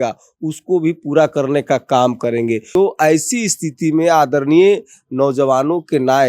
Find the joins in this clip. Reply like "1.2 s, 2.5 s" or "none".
2.6 s